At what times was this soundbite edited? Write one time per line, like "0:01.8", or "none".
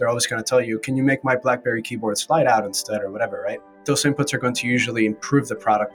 0:03.8